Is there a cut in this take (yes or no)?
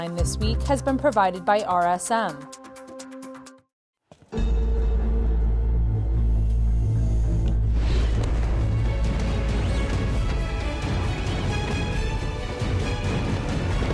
yes